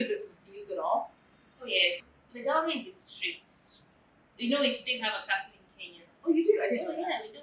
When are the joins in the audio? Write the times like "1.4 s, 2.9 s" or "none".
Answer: 2.1 s